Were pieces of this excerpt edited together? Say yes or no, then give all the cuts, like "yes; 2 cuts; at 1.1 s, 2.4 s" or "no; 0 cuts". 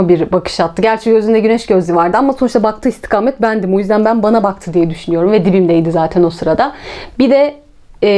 no; 0 cuts